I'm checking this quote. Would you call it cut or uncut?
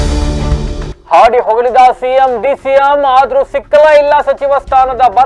cut